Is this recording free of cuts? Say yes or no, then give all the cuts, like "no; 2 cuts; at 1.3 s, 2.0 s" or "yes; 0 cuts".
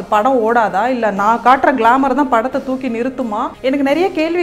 no; 1 cut; at 3.5 s